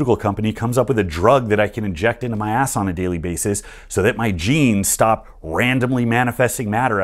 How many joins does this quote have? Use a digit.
0